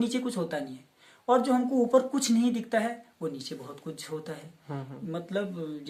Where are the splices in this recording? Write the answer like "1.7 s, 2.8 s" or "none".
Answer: none